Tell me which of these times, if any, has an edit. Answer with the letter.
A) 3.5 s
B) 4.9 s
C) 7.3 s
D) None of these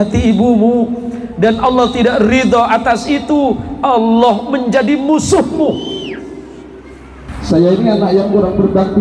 C